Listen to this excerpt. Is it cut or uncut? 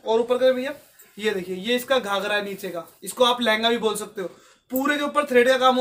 uncut